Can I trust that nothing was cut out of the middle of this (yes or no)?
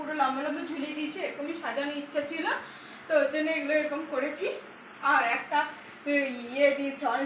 yes